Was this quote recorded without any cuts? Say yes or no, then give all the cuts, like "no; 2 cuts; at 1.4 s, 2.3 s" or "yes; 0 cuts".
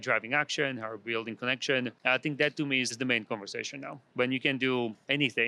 no; 2 cuts; at 2.0 s, 2.9 s